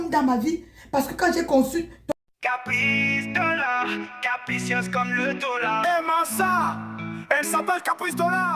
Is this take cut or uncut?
cut